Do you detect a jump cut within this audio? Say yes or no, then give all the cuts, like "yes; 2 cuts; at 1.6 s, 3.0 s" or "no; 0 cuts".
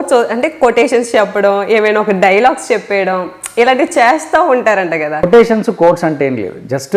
yes; 1 cut; at 5.2 s